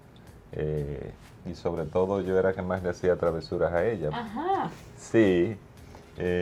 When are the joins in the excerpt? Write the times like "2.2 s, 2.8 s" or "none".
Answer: none